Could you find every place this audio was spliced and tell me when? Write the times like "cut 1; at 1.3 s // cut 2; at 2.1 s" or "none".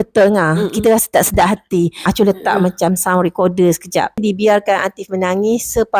cut 1; at 2.0 s // cut 2; at 4.2 s